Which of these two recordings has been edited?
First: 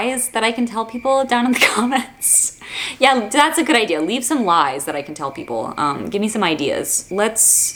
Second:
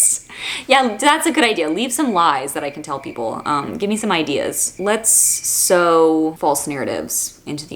second; 1 cut; at 6.4 s

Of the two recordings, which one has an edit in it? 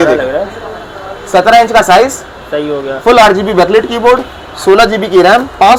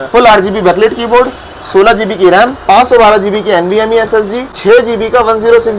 second; 1 cut; at 4.5 s

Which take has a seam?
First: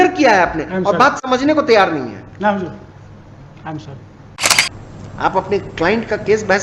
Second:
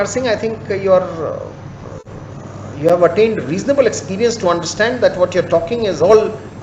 first; 1 cut; at 4.4 s

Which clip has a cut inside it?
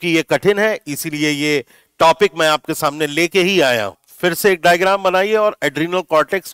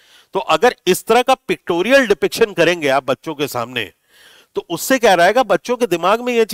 first; 1 cut; at 4.1 s

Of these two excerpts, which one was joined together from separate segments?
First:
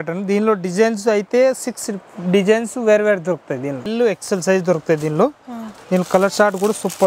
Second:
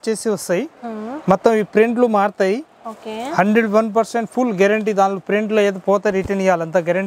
first; 1 cut; at 3.9 s

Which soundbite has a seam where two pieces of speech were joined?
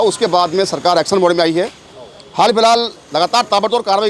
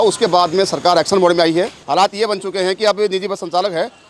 second; 1 cut; at 1.8 s

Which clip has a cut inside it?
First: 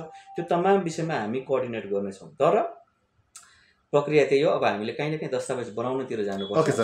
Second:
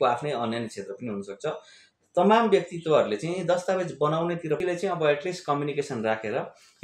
second; 1 cut; at 4.6 s

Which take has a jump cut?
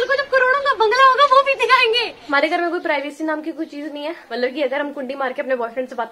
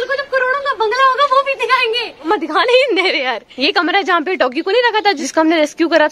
first; 2 cuts; at 2.2 s, 4.2 s

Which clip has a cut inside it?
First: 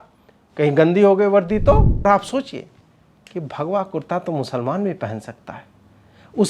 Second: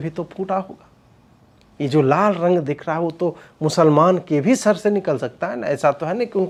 first; 1 cut; at 2.0 s

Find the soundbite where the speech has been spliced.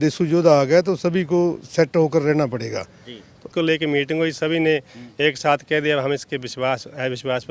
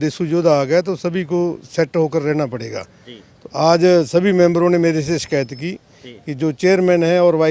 first; 1 cut; at 3.5 s

